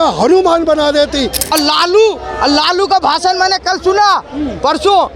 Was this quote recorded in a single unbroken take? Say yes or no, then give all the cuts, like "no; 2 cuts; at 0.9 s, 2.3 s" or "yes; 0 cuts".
no; 1 cut; at 1.5 s